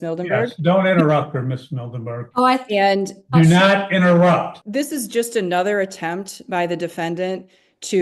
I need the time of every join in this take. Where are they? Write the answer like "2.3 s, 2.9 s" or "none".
4.6 s